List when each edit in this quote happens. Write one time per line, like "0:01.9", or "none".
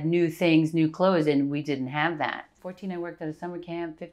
0:02.7